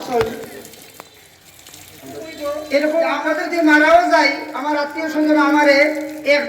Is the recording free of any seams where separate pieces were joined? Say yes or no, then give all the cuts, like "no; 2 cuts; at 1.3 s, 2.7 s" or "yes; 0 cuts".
no; 1 cut; at 3.3 s